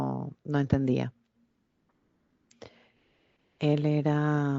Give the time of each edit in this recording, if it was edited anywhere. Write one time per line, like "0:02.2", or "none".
none